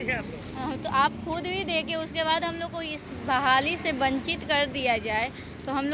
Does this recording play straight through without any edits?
yes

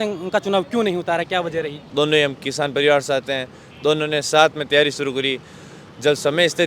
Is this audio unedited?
no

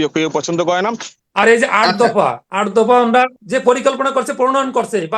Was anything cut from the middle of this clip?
yes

